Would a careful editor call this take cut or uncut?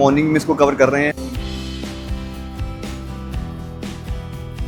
uncut